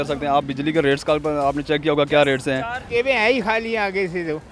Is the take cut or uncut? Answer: cut